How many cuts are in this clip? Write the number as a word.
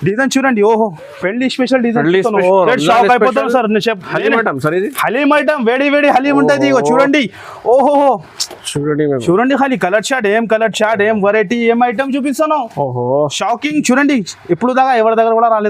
one